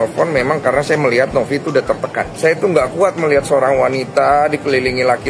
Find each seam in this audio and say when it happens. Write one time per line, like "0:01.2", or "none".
0:02.3